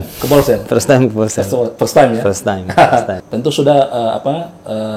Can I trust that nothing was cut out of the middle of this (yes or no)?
no